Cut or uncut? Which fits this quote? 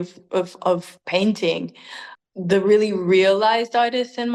uncut